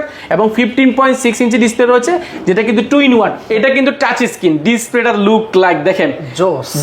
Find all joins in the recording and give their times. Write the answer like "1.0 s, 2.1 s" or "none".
3.5 s